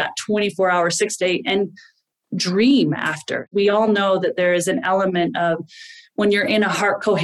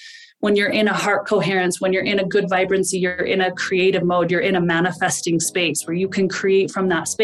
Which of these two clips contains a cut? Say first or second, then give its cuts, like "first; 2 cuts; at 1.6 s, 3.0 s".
first; 1 cut; at 3.5 s